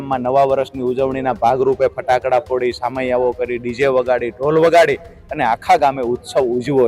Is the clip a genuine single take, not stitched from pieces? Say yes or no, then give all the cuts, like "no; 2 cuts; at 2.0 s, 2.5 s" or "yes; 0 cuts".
yes; 0 cuts